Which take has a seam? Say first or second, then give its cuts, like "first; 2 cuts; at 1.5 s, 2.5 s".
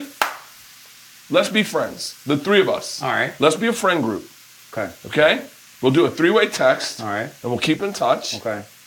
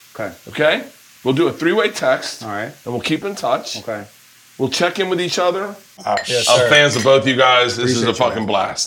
second; 1 cut; at 5.9 s